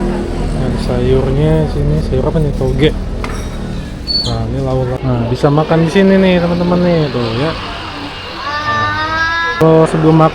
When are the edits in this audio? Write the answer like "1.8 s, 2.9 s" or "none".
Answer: 4.9 s, 9.6 s